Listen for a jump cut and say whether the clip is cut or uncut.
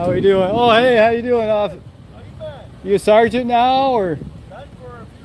uncut